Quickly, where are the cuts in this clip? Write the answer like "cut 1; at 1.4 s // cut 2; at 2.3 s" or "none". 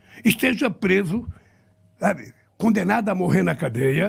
none